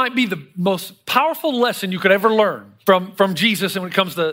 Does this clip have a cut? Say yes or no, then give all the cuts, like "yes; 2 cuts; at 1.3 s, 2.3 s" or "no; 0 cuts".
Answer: yes; 1 cut; at 2.7 s